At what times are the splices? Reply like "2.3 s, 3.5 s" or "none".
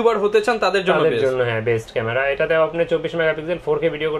none